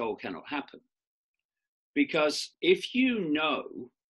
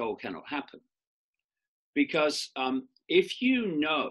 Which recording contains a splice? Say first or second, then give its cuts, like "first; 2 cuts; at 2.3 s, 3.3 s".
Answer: first; 1 cut; at 2.5 s